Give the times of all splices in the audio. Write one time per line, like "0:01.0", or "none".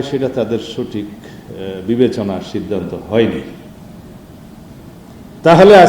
none